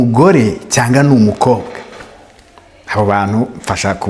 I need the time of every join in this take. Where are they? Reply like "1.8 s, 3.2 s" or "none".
none